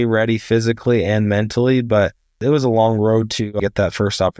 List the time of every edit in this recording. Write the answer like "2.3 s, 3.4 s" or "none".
2.4 s, 3.6 s